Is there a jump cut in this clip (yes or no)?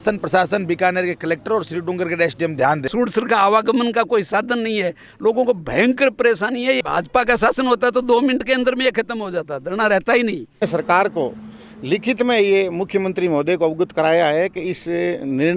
yes